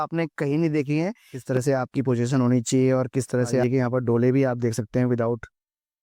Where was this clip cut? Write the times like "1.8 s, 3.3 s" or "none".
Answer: 1.3 s, 3.6 s